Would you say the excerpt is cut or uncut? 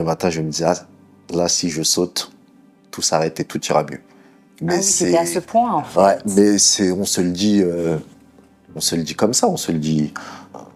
uncut